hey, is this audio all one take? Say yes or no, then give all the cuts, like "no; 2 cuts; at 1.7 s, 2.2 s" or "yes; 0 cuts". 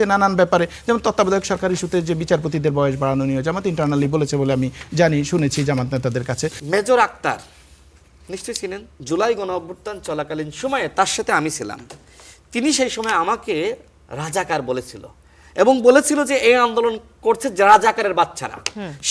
no; 2 cuts; at 6.6 s, 8.9 s